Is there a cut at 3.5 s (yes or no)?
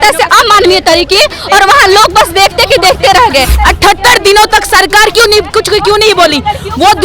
yes